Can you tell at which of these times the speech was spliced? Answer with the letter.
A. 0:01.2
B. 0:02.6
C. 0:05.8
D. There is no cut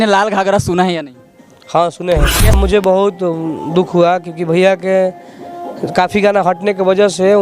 B